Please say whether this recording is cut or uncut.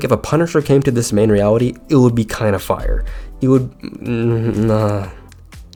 uncut